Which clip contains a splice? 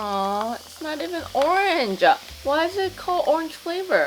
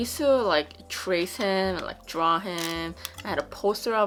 first; 1 cut; at 2.3 s

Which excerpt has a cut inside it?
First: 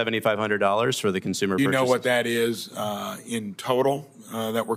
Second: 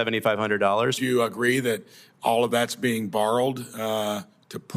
second; 1 cut; at 1.0 s

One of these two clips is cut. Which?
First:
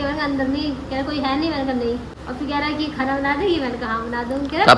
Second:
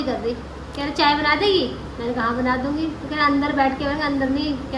first; 1 cut; at 2.2 s

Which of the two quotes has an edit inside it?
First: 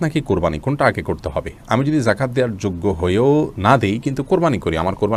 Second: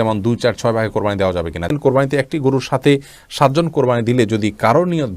second; 1 cut; at 1.7 s

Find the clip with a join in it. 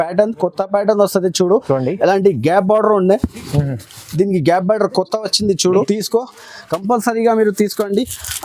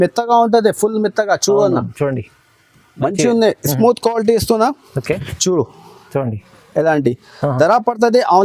first; 1 cut; at 5.8 s

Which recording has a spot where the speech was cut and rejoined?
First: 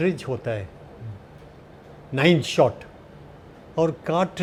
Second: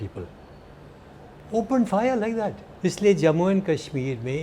second; 1 cut; at 2.6 s

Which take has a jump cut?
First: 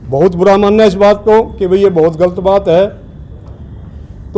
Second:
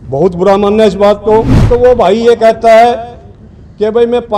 second; 1 cut; at 1.6 s

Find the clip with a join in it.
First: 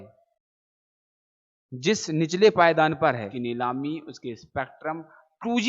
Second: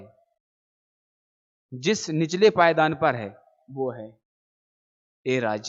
first; 1 cut; at 3.3 s

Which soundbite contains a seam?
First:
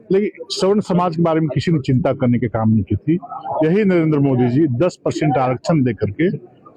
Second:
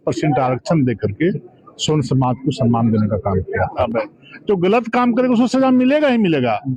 second; 1 cut; at 3.8 s

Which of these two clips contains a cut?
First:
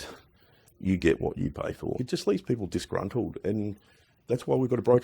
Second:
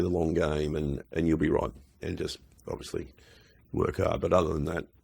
first; 1 cut; at 2.0 s

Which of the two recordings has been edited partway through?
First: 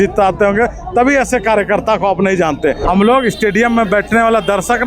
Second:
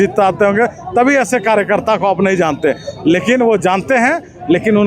first; 1 cut; at 2.8 s

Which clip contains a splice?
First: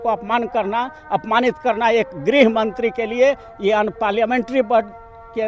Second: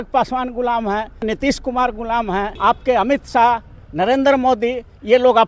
second; 2 cuts; at 1.2 s, 2.5 s

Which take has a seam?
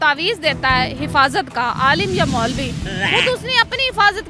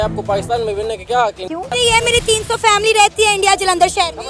second; 1 cut; at 1.7 s

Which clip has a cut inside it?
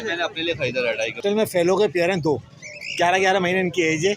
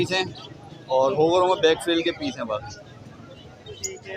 first; 1 cut; at 1.2 s

